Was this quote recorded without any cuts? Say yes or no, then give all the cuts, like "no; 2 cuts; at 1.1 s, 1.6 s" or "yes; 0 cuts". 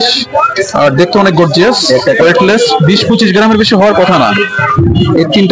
no; 1 cut; at 2.2 s